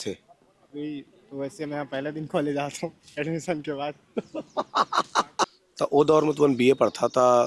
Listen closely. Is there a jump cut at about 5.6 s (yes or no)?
yes